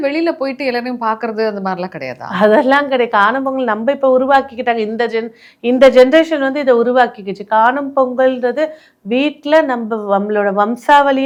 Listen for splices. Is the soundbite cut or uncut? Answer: uncut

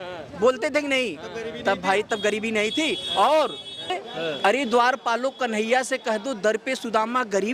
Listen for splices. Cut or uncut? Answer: cut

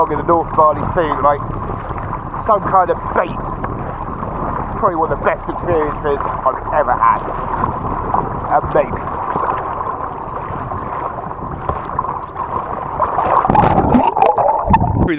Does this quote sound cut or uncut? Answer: uncut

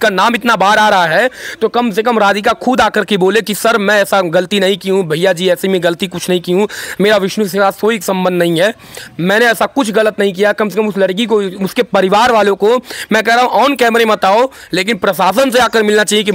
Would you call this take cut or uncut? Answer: uncut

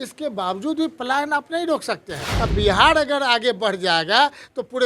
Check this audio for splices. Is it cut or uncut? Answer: cut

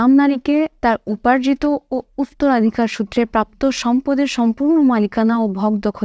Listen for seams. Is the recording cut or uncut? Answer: uncut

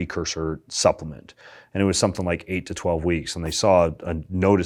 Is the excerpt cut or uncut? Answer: uncut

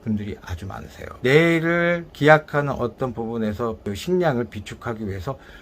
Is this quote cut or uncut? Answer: cut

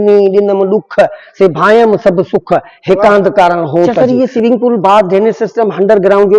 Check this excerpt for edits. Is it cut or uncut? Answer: cut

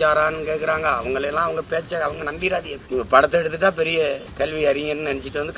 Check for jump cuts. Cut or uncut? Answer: cut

